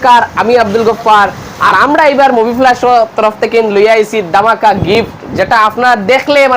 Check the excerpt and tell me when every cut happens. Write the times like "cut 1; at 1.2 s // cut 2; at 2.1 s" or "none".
cut 1; at 1.6 s